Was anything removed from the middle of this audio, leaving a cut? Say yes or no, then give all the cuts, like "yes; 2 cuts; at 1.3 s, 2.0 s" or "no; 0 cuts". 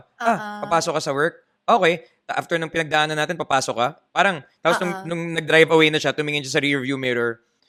no; 0 cuts